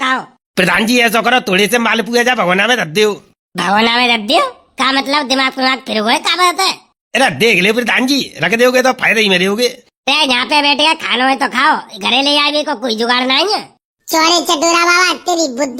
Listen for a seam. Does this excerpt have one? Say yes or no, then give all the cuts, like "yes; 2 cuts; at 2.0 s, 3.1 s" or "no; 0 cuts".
no; 0 cuts